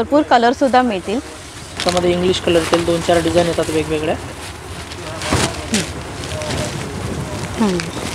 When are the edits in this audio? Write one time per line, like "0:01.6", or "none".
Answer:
none